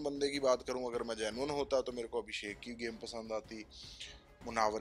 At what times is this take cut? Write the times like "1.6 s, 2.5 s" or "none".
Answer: none